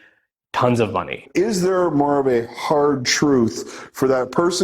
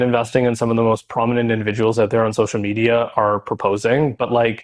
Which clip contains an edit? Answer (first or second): first